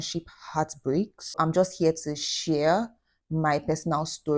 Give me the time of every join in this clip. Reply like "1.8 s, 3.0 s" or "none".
1.2 s